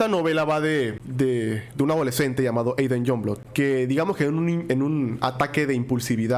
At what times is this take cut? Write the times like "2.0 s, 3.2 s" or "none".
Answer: 1.3 s, 3.4 s